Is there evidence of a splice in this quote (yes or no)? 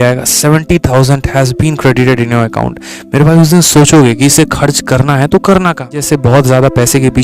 yes